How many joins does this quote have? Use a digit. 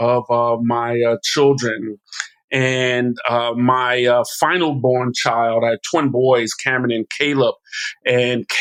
0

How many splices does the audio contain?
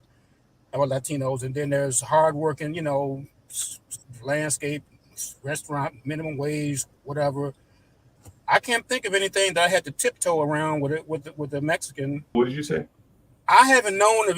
1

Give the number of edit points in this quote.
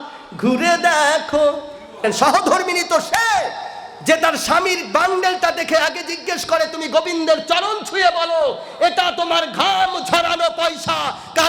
1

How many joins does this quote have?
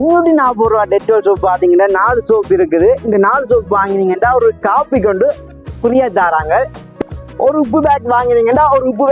1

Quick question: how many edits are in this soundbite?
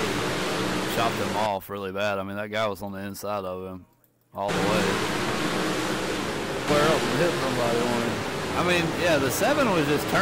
1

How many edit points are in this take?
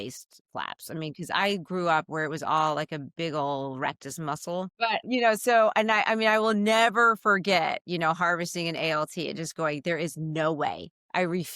1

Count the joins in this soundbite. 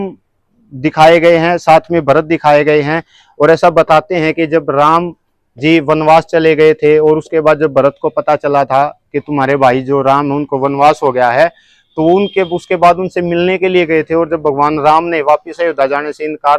0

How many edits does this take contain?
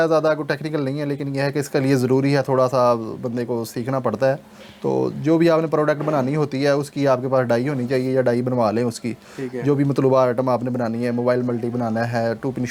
0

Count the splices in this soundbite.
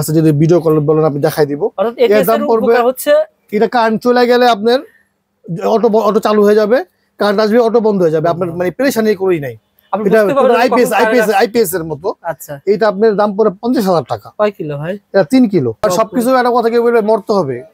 1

